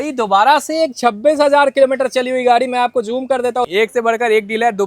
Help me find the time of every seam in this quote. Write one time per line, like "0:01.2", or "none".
0:03.7